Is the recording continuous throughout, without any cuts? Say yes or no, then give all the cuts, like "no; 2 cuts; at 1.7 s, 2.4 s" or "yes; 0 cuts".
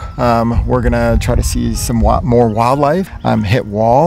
no; 1 cut; at 3.1 s